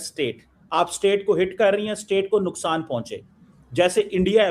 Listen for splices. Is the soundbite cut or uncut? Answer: uncut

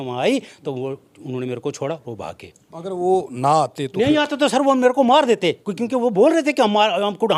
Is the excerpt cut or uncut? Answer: uncut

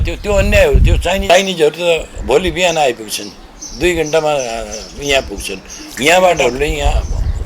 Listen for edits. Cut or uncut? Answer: cut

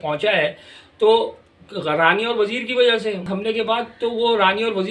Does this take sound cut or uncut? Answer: cut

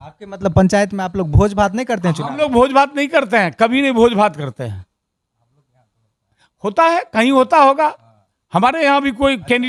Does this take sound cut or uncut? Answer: uncut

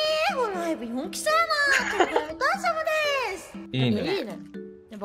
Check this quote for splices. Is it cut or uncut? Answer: cut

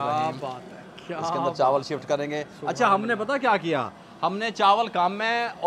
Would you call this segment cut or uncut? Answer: uncut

